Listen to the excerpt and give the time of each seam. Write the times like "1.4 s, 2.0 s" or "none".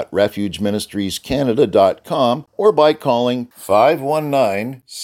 2.5 s